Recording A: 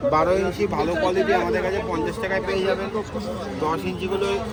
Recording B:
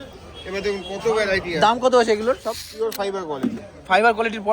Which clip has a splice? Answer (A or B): B